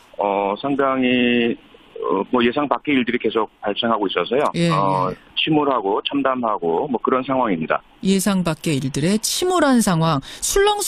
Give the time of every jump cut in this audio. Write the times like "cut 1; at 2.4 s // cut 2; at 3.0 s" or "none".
cut 1; at 9.8 s